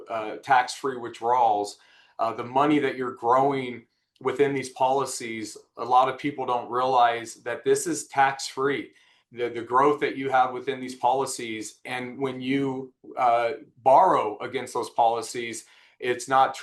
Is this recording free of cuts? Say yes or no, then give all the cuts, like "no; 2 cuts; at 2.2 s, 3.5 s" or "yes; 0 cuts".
yes; 0 cuts